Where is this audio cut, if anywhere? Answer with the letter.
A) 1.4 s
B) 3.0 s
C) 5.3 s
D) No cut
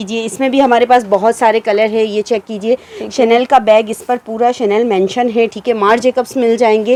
D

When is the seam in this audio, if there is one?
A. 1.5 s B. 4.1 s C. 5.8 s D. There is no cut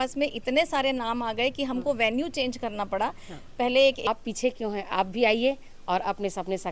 B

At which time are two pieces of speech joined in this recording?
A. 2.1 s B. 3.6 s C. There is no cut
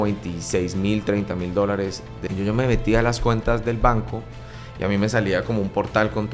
A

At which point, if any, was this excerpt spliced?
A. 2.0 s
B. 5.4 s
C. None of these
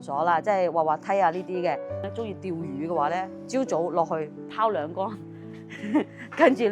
A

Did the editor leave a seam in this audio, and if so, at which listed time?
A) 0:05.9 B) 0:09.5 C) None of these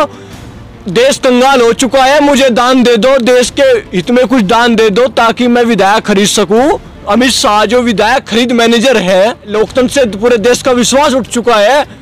B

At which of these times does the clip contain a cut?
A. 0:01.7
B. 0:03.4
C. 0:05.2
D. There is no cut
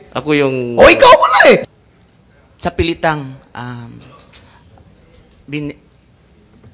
A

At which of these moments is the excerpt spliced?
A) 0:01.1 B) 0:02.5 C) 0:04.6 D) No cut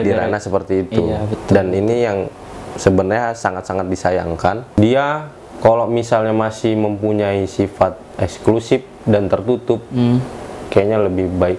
C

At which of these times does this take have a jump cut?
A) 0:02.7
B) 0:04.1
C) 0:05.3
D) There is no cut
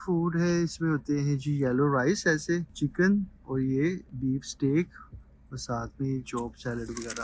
D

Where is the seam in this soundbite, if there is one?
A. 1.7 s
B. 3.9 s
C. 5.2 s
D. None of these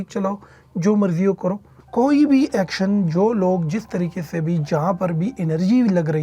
A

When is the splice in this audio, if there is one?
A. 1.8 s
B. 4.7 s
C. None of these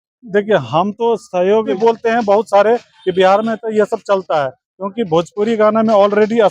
A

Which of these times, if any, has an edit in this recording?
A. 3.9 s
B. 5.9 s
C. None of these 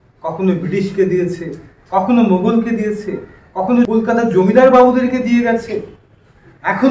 A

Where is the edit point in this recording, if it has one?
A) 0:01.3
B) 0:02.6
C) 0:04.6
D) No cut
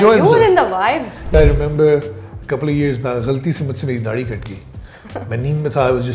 A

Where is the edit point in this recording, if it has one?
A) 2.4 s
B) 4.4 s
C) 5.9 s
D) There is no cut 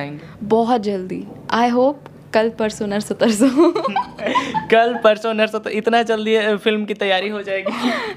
D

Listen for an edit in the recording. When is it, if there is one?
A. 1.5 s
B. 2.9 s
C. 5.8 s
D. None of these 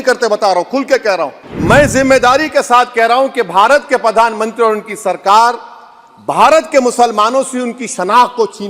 A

